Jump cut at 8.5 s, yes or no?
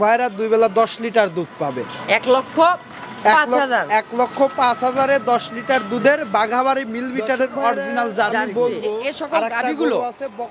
yes